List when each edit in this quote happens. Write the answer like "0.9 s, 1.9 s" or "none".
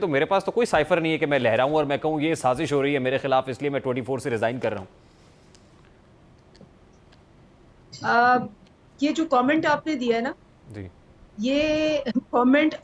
none